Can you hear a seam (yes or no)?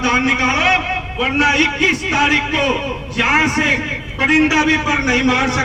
no